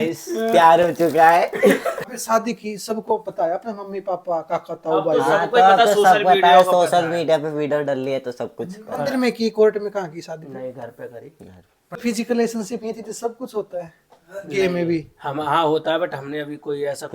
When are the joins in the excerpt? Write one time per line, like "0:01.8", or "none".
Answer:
0:02.0
0:12.0